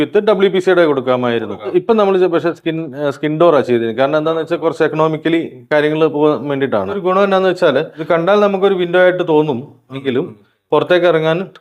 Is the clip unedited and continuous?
no; 3 cuts; at 1.7 s, 7.0 s, 8.0 s

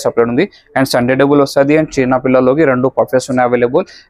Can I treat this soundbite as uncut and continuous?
yes; 0 cuts

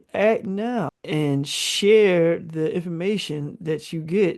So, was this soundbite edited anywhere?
yes; 1 cut; at 1.0 s

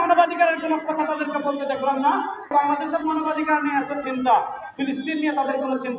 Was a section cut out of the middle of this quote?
yes; 1 cut; at 2.5 s

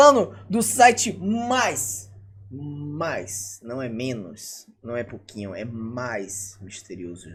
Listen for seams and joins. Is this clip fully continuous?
yes; 0 cuts

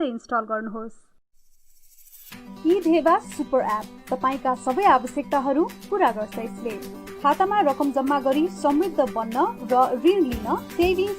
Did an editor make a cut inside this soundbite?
yes; 1 cut; at 1.1 s

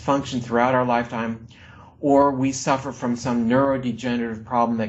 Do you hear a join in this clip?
no; 0 cuts

